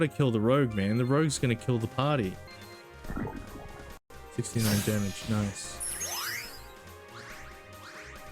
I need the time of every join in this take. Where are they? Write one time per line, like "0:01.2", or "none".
0:02.5
0:04.0
0:05.8